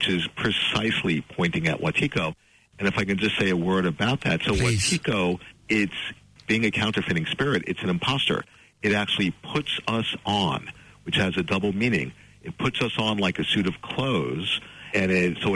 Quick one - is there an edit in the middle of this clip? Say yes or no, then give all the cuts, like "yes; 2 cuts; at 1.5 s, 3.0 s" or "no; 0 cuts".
yes; 1 cut; at 5.5 s